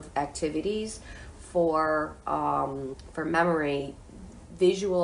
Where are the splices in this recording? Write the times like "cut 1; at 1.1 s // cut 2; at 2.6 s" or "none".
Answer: cut 1; at 3.0 s